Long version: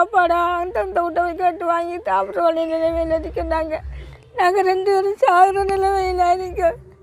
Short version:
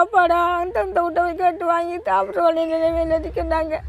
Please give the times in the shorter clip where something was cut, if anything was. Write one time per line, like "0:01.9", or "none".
none